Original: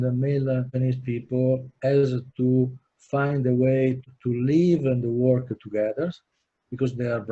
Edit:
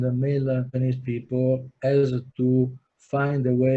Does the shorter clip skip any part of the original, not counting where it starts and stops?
no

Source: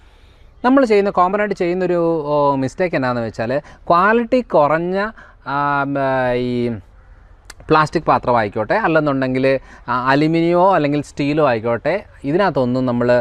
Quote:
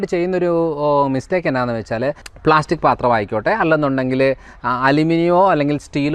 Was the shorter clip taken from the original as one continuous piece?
no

